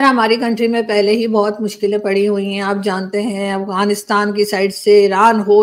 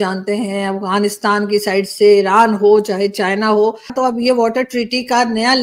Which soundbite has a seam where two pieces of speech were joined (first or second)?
second